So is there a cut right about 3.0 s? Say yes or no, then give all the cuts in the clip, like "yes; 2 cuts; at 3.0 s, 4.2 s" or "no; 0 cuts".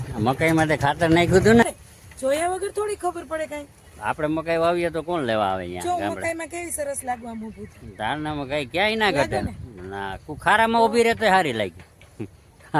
no; 1 cut; at 1.6 s